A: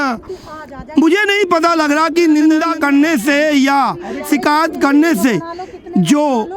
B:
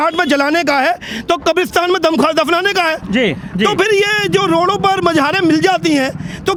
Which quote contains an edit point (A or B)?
A